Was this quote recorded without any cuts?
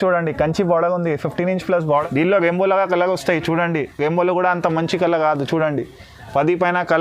no; 1 cut; at 1.8 s

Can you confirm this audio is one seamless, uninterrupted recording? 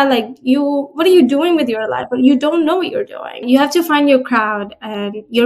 no; 1 cut; at 3.4 s

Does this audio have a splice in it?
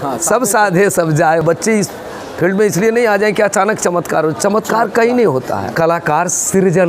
yes; 2 cuts; at 1.4 s, 5.7 s

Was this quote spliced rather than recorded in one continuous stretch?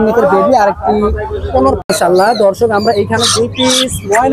yes; 1 cut; at 1.8 s

